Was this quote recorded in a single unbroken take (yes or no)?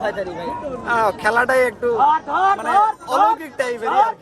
yes